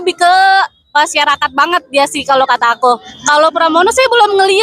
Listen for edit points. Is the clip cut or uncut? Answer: cut